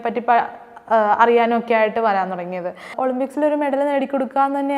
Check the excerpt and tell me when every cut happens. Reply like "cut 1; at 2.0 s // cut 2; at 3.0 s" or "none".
cut 1; at 2.9 s